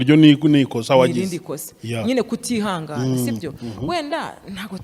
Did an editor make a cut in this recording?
no; 0 cuts

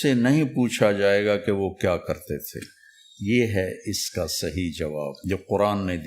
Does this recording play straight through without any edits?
no; 1 cut; at 5.2 s

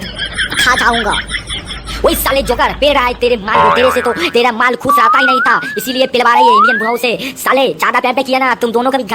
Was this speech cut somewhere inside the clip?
no; 0 cuts

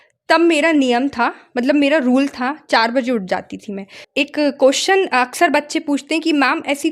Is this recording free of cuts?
no; 1 cut; at 4.0 s

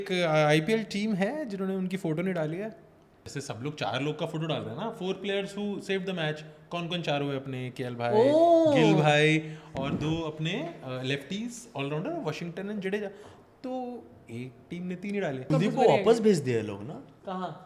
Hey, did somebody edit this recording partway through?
yes; 2 cuts; at 3.2 s, 15.5 s

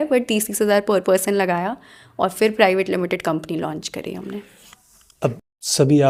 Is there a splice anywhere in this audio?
no; 0 cuts

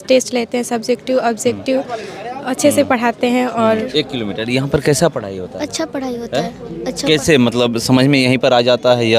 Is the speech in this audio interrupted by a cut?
yes; 1 cut; at 3.9 s

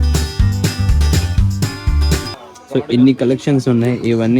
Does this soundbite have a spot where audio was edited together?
yes; 1 cut; at 2.3 s

